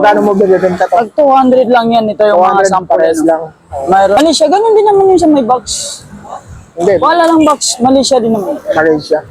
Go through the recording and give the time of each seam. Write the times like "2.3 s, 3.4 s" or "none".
4.2 s